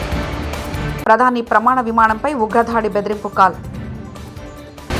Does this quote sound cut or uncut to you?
uncut